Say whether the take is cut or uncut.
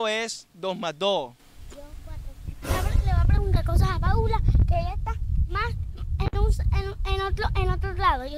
uncut